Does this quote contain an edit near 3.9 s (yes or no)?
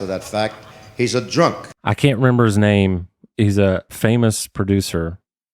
yes